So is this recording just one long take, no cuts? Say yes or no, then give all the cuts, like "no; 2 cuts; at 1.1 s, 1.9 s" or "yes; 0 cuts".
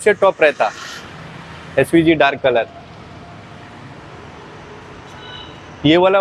yes; 0 cuts